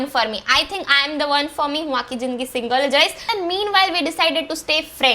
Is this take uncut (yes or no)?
no